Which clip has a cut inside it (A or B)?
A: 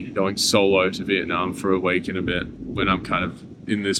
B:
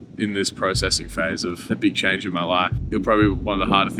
B